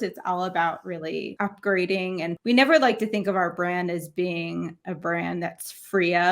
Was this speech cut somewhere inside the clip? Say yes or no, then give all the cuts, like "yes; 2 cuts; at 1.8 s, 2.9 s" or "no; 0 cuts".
yes; 2 cuts; at 1.3 s, 2.4 s